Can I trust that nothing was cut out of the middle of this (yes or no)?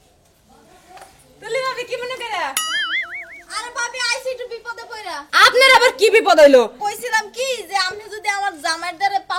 no